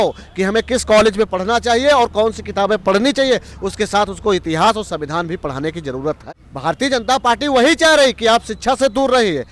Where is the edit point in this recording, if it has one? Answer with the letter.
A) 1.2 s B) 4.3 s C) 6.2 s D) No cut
C